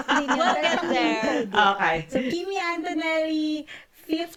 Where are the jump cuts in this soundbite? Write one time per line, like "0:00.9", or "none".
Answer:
none

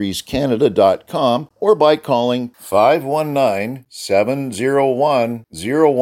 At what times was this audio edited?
0:01.5

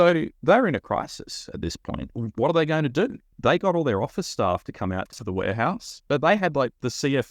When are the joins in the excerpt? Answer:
0:02.1
0:03.2
0:05.2

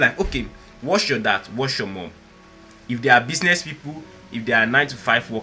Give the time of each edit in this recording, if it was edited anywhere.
none

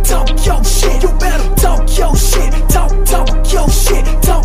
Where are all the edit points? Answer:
0:03.3

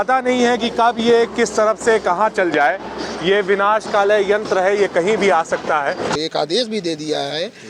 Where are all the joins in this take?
0:06.1

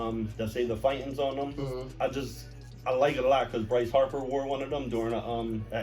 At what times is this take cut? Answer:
0:01.9

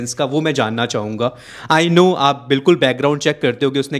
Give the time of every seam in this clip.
none

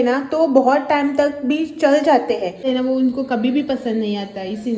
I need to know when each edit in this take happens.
0:02.6

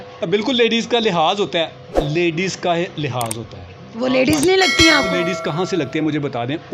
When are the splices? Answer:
none

